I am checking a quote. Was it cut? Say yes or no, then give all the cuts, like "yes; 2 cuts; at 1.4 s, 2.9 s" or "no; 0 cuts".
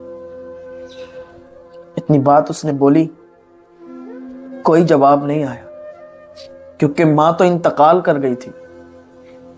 no; 0 cuts